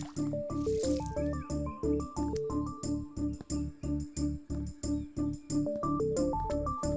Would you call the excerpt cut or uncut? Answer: uncut